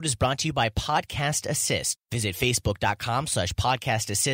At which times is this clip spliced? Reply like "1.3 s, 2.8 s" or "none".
1.9 s